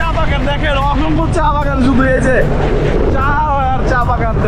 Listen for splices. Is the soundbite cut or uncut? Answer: uncut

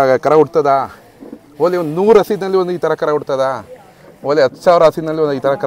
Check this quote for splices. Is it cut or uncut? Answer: uncut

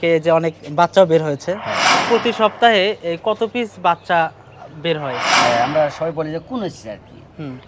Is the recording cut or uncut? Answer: cut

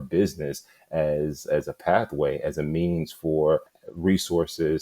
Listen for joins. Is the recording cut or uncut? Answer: cut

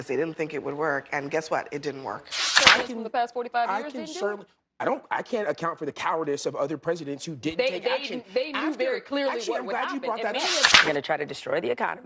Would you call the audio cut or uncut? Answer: cut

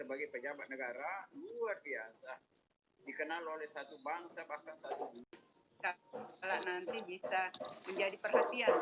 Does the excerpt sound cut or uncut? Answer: cut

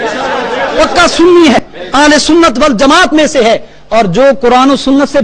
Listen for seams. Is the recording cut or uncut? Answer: cut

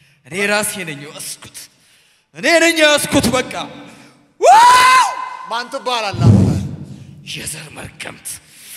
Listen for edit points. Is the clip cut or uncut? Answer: uncut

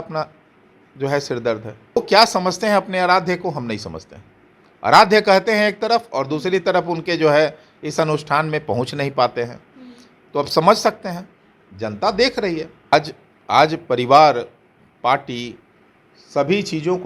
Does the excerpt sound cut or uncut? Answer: cut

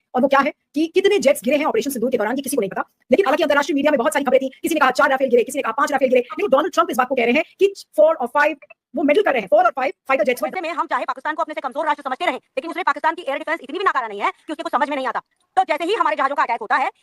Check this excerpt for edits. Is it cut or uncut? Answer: cut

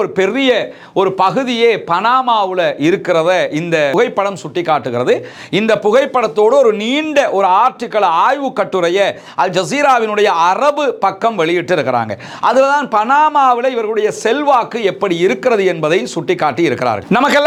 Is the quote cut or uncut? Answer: uncut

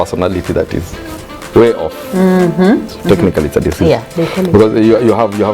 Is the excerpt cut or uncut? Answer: cut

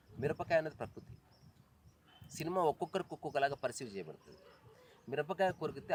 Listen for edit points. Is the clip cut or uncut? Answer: uncut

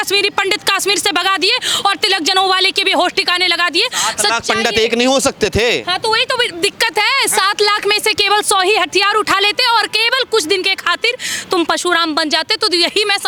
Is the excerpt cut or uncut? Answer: uncut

